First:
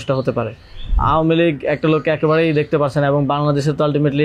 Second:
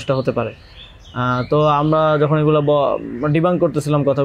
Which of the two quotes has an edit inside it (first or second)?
first